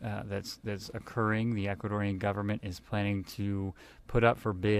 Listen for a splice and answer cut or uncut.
uncut